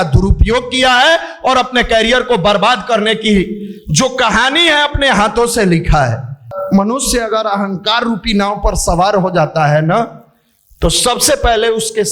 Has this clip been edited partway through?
yes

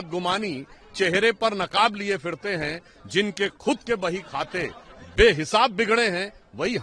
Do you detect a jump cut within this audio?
no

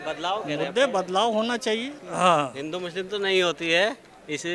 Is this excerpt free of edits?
no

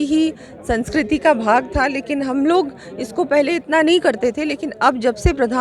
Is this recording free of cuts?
yes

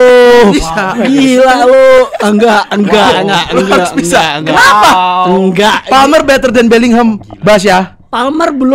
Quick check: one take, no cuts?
yes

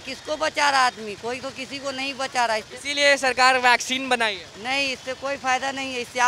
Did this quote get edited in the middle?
no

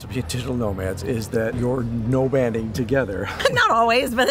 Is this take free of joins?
no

